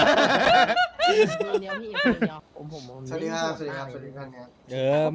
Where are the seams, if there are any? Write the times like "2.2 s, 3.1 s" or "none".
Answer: 2.4 s